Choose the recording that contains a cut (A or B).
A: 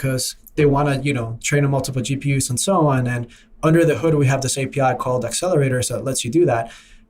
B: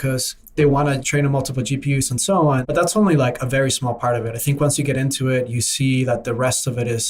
B